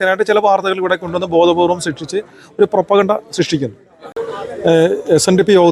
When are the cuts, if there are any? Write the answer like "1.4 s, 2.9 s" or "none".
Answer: 4.1 s